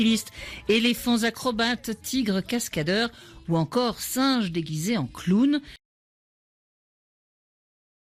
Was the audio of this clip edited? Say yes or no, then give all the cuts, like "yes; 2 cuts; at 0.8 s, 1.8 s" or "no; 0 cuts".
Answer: no; 0 cuts